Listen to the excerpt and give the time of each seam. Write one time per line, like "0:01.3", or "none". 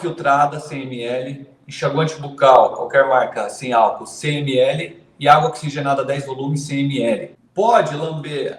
0:07.4